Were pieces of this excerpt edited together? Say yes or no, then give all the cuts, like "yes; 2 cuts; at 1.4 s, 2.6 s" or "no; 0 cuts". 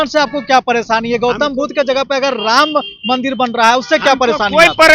no; 0 cuts